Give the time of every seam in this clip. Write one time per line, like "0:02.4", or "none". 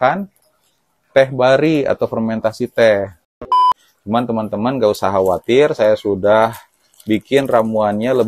0:03.6